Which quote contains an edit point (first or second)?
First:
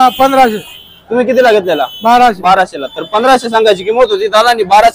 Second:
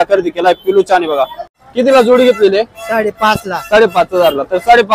second